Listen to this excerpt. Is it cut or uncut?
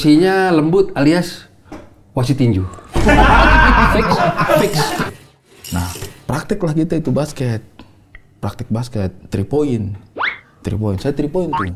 cut